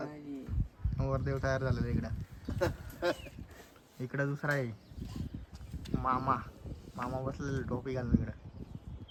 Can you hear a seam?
no; 0 cuts

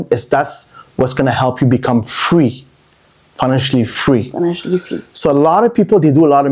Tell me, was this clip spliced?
no; 0 cuts

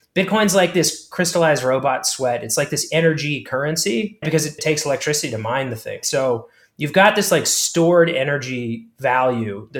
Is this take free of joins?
no; 2 cuts; at 4.4 s, 6.0 s

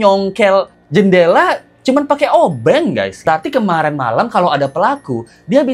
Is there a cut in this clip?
yes; 1 cut; at 3.2 s

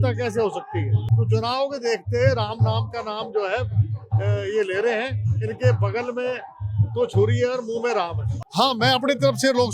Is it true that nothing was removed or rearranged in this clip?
no; 2 cuts; at 1.0 s, 8.3 s

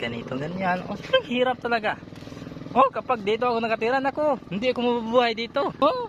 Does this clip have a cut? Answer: no; 0 cuts

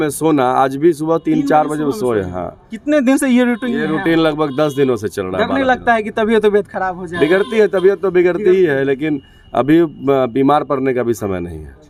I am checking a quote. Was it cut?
no; 0 cuts

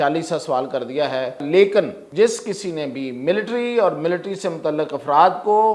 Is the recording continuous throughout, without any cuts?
no; 2 cuts; at 1.4 s, 2.0 s

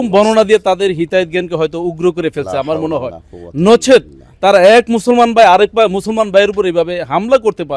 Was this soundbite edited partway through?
no; 0 cuts

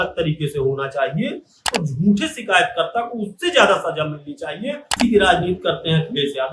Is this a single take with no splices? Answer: no; 2 cuts; at 1.8 s, 5.0 s

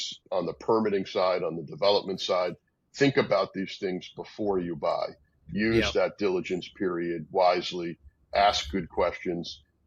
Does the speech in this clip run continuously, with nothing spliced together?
yes; 0 cuts

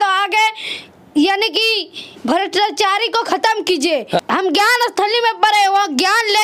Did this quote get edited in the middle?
yes; 1 cut; at 4.2 s

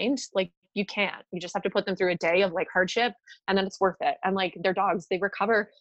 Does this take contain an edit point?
no; 0 cuts

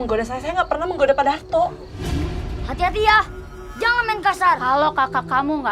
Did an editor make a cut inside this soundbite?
yes; 1 cut; at 2.2 s

